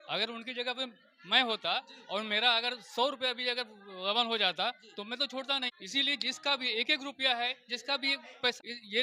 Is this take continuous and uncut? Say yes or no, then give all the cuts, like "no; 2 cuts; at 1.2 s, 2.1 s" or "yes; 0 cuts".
yes; 0 cuts